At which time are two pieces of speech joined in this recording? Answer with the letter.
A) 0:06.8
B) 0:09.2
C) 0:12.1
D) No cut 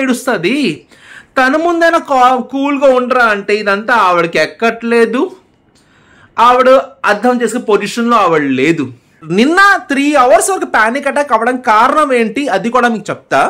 B